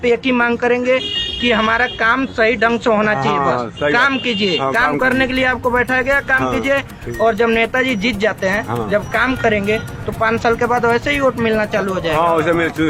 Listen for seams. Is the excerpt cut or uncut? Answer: uncut